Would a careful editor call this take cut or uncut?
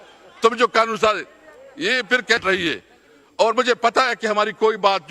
cut